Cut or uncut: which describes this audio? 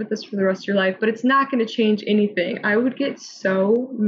uncut